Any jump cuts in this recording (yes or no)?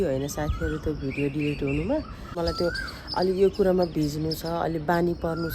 yes